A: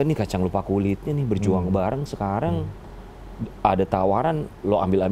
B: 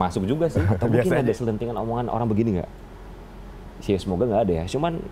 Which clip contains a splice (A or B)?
B